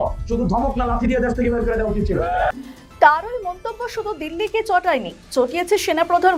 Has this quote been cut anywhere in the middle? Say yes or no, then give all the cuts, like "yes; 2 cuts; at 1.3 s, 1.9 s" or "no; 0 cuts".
no; 0 cuts